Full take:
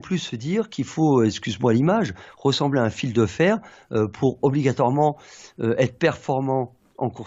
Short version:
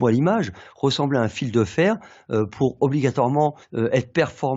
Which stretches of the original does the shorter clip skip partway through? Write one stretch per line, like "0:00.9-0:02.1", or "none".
0:05.3-0:05.5